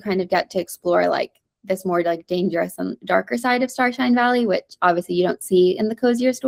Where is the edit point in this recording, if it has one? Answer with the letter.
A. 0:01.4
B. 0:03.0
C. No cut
C